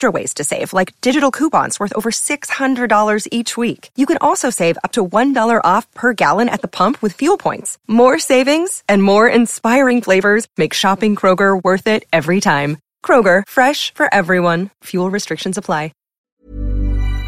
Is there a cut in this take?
yes; 1 cut; at 16.1 s

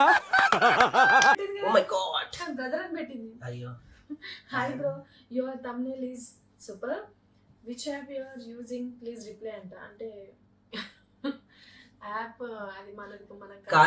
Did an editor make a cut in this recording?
no; 0 cuts

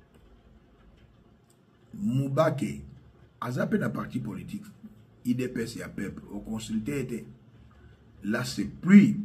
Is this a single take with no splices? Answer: yes; 0 cuts

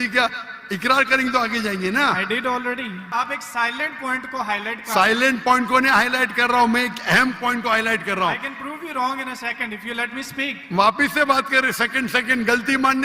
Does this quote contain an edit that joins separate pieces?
yes; 1 cut; at 3.1 s

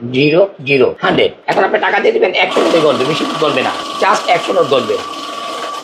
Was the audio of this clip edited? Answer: yes; 2 cuts; at 1.2 s, 3.8 s

